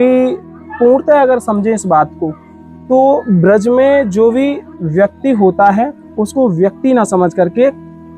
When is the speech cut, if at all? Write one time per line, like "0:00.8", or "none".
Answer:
none